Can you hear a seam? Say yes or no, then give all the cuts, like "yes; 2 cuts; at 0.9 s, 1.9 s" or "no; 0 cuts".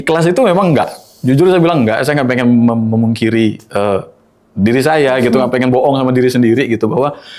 no; 0 cuts